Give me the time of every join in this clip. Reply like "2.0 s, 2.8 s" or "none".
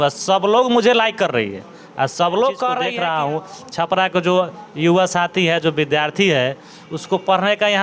2.9 s